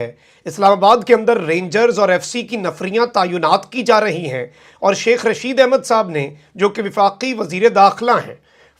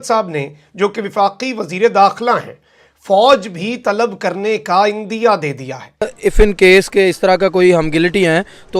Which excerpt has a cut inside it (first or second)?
second